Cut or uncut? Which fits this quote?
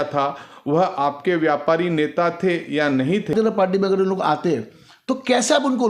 cut